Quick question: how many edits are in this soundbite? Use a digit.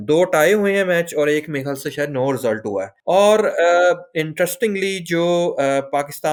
0